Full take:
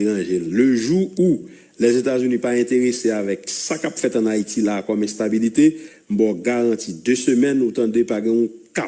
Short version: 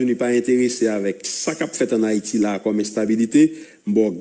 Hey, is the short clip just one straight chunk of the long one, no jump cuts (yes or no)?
yes